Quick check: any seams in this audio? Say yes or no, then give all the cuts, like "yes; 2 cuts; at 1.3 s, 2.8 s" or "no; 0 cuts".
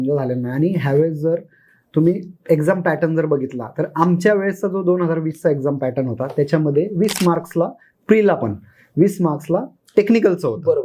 no; 0 cuts